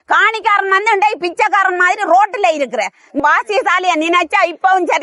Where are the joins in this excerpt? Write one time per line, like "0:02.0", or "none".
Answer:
0:03.2

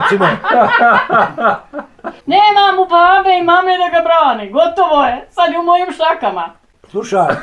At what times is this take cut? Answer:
0:02.2

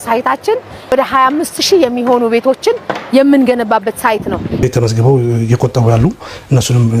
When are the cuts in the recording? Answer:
0:00.9
0:04.6

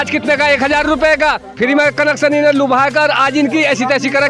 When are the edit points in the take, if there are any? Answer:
none

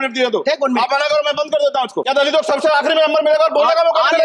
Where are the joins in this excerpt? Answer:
0:02.1

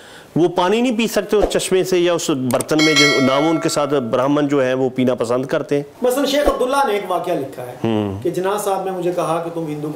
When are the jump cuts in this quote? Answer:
0:05.9

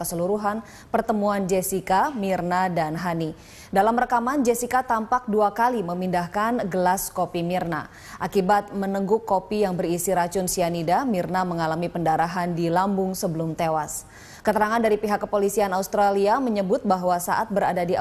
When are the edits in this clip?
0:15.7

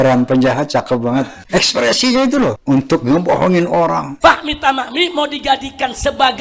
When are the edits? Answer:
0:01.4
0:02.6
0:04.1

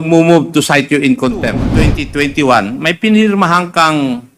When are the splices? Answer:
0:01.7

